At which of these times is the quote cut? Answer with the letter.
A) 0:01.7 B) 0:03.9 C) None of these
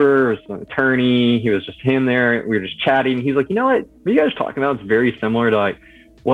C